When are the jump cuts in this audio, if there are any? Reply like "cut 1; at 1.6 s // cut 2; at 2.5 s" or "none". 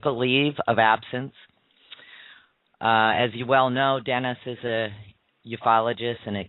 cut 1; at 1.8 s